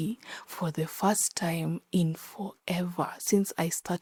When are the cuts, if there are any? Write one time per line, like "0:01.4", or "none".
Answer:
none